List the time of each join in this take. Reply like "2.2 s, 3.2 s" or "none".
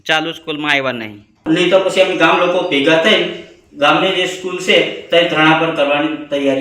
1.4 s